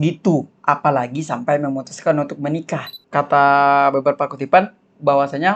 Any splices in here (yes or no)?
yes